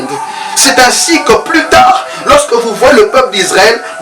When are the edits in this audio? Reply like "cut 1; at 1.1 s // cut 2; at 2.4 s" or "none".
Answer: none